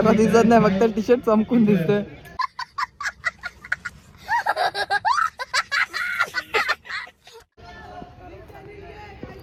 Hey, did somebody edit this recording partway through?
no; 0 cuts

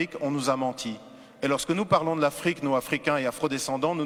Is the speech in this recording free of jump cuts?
yes; 0 cuts

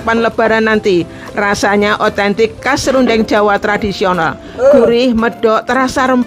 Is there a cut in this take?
no; 0 cuts

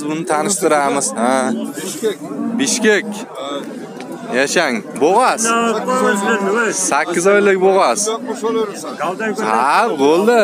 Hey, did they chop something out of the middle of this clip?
no; 0 cuts

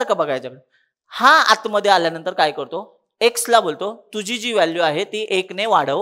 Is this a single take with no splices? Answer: yes; 0 cuts

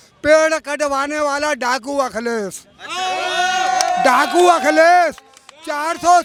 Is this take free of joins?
yes; 0 cuts

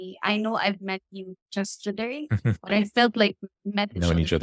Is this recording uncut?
yes; 0 cuts

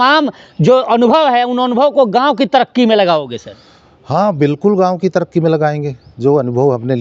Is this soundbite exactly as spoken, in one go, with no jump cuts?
yes; 0 cuts

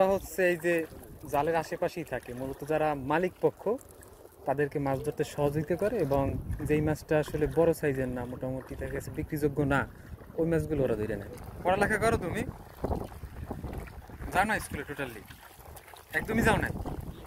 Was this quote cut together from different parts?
no; 0 cuts

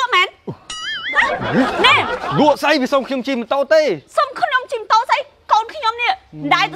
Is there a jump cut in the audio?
no; 0 cuts

